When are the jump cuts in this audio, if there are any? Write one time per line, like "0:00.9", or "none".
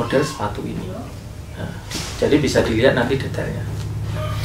none